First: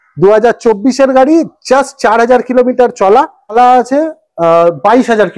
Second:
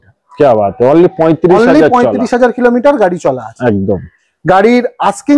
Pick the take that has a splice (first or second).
first